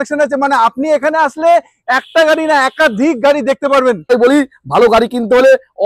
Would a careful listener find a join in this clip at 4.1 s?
yes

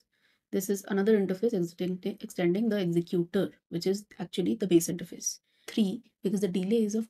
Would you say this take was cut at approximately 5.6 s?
yes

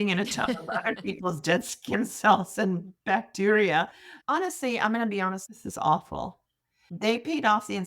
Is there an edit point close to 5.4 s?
yes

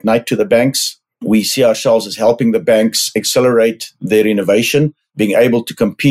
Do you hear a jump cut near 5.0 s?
yes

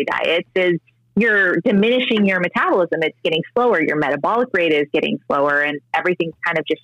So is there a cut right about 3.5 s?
no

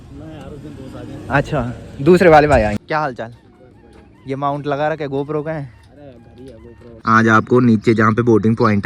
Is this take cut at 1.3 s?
no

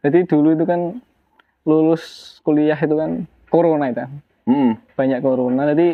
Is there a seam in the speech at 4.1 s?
no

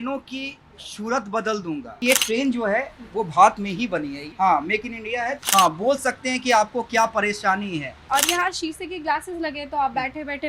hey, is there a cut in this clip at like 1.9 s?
yes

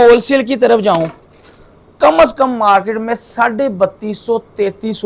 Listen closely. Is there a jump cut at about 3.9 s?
no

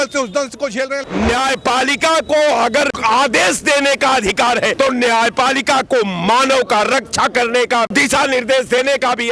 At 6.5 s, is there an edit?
no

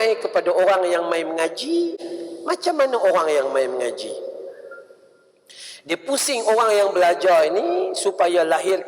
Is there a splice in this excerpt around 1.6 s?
no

